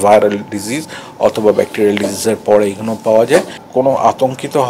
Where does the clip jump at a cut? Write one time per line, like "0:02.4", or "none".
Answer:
0:03.6